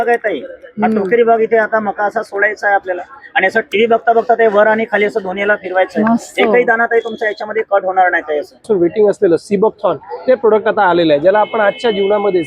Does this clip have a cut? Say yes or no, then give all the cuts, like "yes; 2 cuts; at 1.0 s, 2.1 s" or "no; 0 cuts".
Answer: yes; 1 cut; at 8.7 s